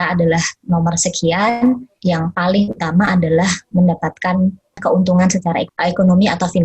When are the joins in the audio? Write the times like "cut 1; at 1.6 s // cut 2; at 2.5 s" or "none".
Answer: cut 1; at 1.9 s // cut 2; at 4.8 s // cut 3; at 5.7 s